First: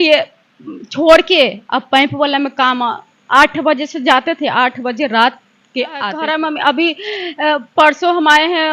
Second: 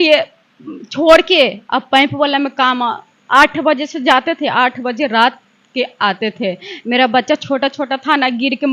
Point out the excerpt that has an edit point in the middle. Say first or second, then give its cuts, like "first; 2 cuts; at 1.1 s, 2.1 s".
first; 1 cut; at 6.2 s